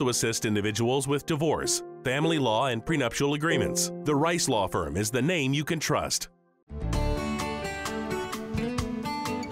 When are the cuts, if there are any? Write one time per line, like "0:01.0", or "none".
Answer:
0:06.8